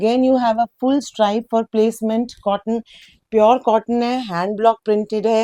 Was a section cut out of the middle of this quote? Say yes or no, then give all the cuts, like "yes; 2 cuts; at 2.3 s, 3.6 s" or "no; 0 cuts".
no; 0 cuts